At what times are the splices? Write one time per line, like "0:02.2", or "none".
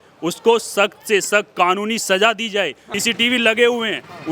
0:02.9